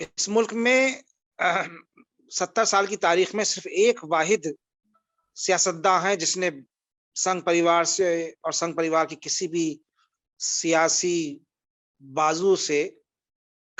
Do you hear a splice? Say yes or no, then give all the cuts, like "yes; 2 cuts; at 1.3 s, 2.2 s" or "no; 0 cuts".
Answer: no; 0 cuts